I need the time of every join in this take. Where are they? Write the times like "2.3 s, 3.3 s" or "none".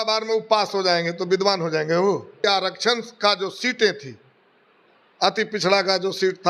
2.4 s